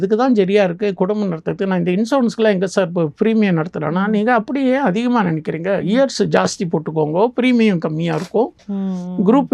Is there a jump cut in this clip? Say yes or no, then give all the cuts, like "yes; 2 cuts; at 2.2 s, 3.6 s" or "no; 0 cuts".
no; 0 cuts